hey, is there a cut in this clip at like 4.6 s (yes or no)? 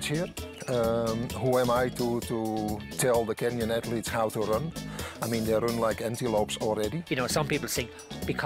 no